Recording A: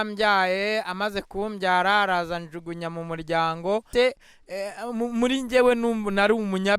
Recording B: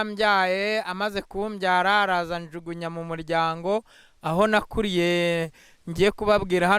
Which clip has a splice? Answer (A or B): A